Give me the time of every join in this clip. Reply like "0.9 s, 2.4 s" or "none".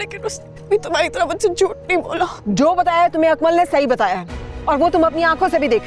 2.4 s

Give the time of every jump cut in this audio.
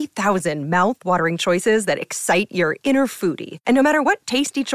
none

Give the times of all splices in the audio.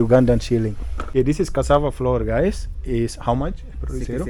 1.1 s

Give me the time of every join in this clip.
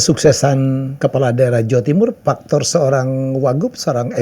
0.9 s

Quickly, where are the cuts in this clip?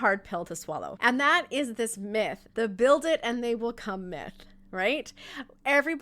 0.9 s, 2.4 s

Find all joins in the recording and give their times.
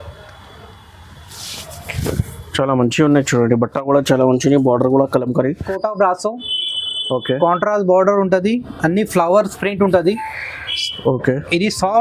5.8 s

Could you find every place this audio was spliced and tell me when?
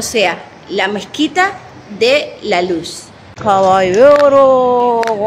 3.5 s

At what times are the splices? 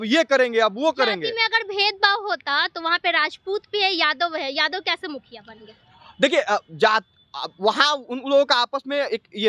none

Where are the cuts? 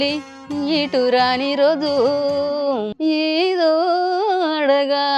2.9 s

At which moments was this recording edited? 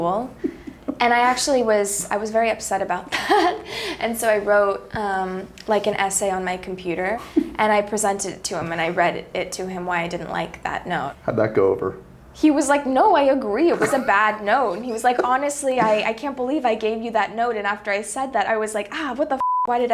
7.2 s, 11.1 s, 18.4 s

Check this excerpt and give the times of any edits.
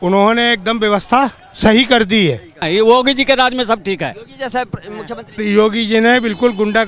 2.7 s, 5.4 s

